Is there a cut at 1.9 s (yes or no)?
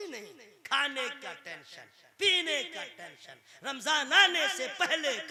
no